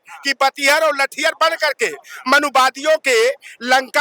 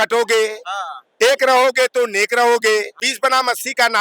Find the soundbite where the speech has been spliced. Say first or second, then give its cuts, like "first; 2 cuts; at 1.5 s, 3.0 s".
second; 1 cut; at 2.9 s